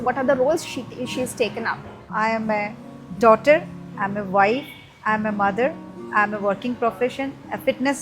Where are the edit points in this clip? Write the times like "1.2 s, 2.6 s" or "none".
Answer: 2.1 s